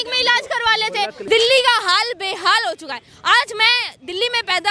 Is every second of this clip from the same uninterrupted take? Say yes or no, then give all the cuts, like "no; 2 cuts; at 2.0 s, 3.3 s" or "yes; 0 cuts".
no; 1 cut; at 1.2 s